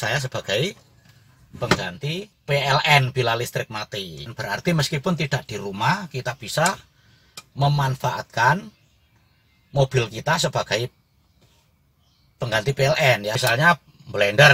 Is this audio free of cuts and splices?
no; 1 cut; at 2.3 s

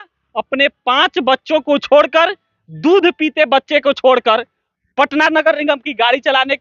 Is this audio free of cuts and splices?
yes; 0 cuts

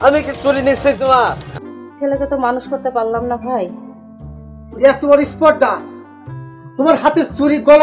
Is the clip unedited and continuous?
no; 1 cut; at 1.5 s

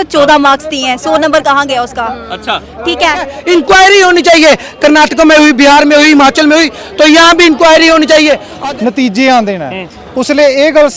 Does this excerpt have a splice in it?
yes; 2 cuts; at 3.3 s, 8.5 s

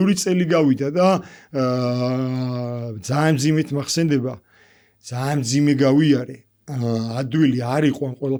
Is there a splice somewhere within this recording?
no; 0 cuts

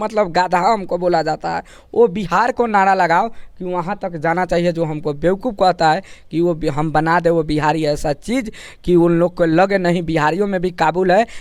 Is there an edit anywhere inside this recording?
no; 0 cuts

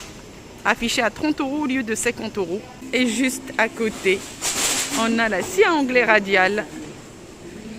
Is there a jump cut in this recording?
yes; 1 cut; at 2.8 s

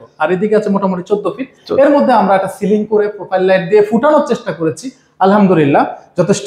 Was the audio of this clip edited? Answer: no; 0 cuts

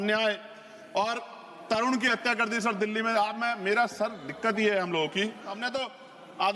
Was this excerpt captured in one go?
no; 1 cut; at 5.6 s

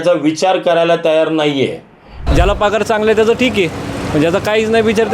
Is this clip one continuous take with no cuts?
no; 1 cut; at 2.1 s

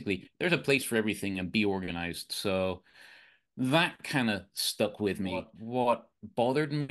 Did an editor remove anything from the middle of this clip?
yes; 1 cut; at 5.6 s

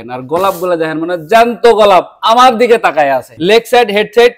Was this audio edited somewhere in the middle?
yes; 1 cut; at 3.3 s

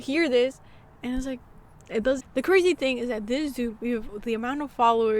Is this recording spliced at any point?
yes; 1 cut; at 2.2 s

